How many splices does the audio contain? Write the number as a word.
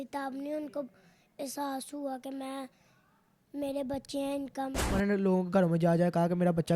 one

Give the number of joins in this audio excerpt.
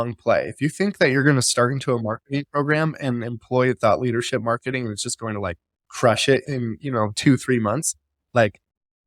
zero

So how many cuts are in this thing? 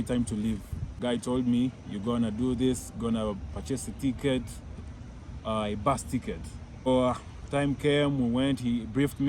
two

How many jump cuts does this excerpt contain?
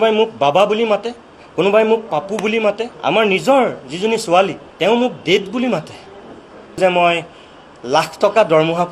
three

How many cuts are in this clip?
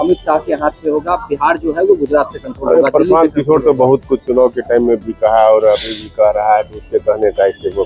zero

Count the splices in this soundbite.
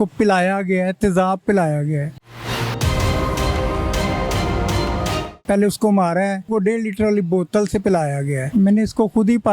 four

